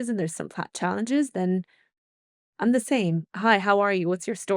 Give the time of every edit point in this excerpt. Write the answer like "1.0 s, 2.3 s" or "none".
3.3 s